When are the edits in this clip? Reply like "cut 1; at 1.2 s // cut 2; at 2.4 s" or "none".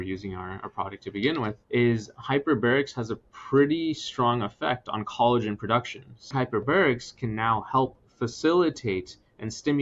cut 1; at 1.6 s // cut 2; at 6.3 s